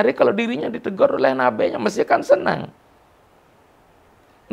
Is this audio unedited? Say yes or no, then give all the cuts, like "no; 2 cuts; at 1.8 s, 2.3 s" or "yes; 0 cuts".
yes; 0 cuts